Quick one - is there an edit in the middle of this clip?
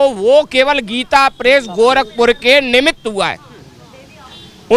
no; 0 cuts

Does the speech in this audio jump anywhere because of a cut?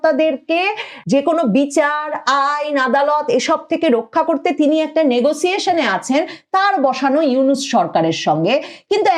yes; 1 cut; at 1.0 s

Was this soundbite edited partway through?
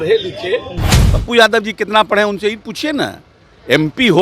yes; 1 cut; at 0.9 s

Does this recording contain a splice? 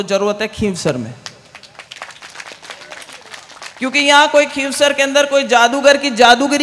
no; 0 cuts

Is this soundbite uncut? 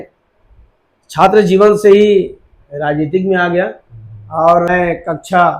no; 1 cut; at 4.7 s

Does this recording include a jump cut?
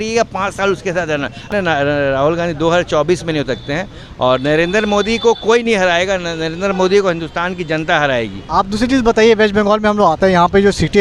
yes; 2 cuts; at 1.4 s, 8.4 s

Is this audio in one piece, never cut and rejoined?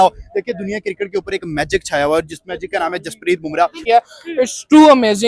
no; 1 cut; at 3.8 s

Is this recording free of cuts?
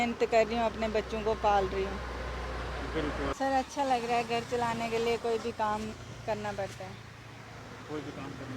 no; 1 cut; at 3.3 s

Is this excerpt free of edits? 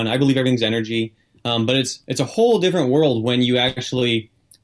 yes; 0 cuts

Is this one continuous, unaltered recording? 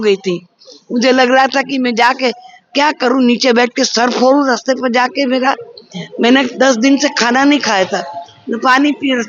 yes; 0 cuts

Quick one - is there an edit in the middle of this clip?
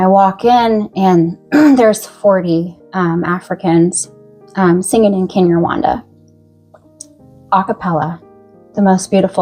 no; 0 cuts

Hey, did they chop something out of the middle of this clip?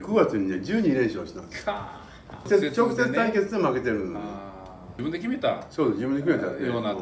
yes; 2 cuts; at 2.5 s, 4.9 s

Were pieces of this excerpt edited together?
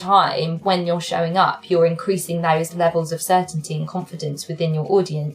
no; 0 cuts

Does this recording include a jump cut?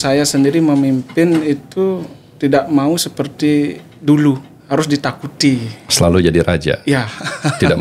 no; 0 cuts

